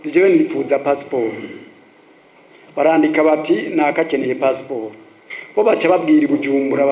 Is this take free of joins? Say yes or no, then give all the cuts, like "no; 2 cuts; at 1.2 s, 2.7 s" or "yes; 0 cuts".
yes; 0 cuts